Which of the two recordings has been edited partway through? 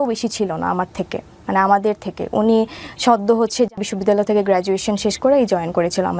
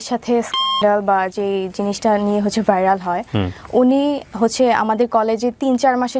first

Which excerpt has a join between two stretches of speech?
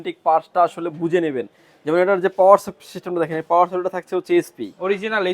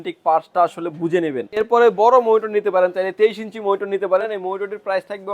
second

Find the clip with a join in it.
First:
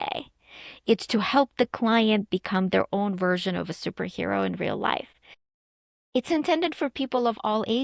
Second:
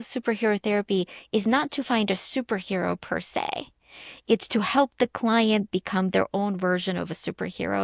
first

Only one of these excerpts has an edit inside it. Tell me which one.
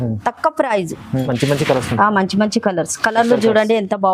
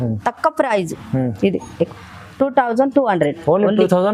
first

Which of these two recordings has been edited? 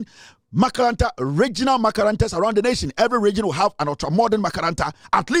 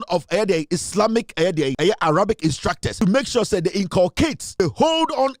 second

